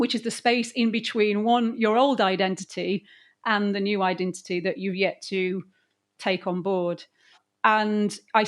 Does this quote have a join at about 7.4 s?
yes; 1 cut; at 7.4 s

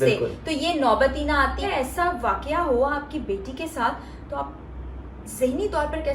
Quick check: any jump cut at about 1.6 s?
yes; 1 cut; at 1.6 s

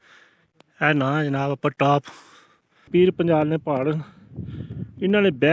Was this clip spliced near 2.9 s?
yes; 1 cut; at 2.9 s

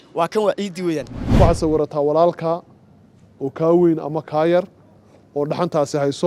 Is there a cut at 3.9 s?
no; 1 cut; at 1.2 s

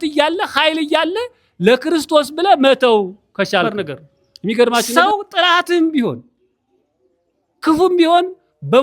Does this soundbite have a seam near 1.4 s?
no; 1 cut; at 4.9 s

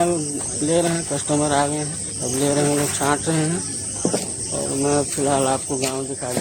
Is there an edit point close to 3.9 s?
no; 0 cuts

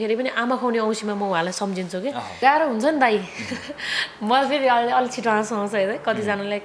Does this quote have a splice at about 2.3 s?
yes; 1 cut; at 2.3 s

